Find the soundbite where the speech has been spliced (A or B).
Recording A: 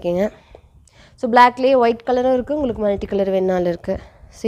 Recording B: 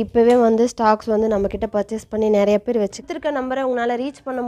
B